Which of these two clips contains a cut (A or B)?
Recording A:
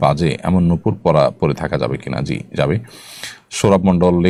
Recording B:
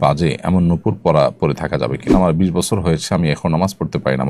B